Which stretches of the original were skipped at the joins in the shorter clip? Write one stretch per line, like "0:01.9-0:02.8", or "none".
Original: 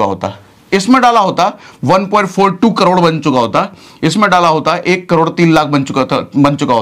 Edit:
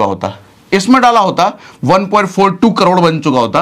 none